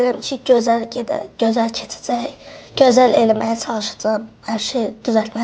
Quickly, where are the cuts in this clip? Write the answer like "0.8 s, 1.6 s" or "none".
none